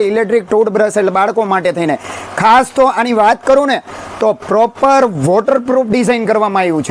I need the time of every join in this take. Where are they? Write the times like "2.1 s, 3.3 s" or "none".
none